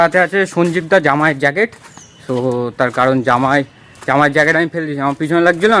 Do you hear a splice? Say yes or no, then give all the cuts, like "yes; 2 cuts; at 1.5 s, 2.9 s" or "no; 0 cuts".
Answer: no; 0 cuts